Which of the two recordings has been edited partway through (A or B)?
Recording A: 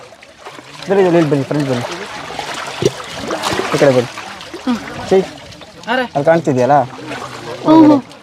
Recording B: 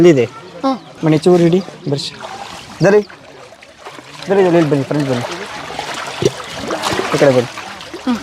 B